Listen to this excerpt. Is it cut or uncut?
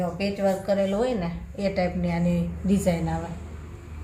uncut